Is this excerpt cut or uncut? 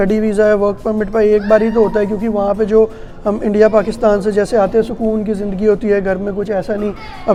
uncut